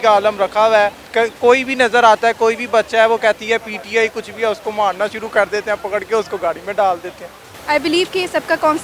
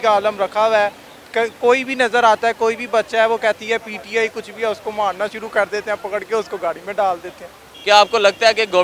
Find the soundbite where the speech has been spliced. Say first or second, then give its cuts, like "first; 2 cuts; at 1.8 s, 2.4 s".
first; 2 cuts; at 1.0 s, 7.5 s